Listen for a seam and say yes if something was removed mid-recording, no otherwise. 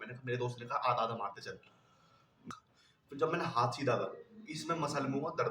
yes